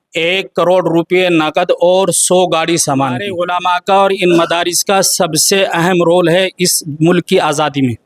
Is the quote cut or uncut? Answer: cut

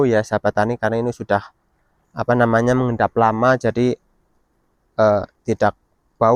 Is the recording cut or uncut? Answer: uncut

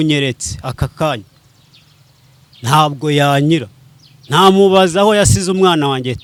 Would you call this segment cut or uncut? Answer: uncut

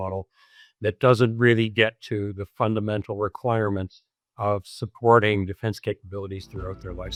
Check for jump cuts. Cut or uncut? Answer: uncut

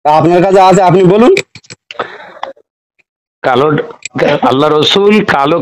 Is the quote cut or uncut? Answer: uncut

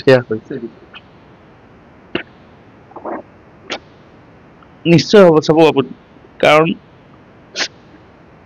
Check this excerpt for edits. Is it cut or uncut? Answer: uncut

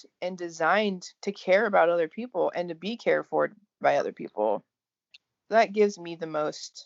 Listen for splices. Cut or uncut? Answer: uncut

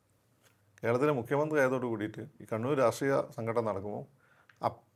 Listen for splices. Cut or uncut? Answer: uncut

